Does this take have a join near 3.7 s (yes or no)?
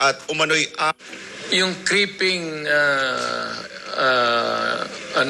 no